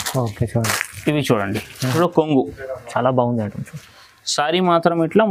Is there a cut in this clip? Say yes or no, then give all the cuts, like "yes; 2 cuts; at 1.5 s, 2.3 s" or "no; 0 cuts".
yes; 1 cut; at 1.9 s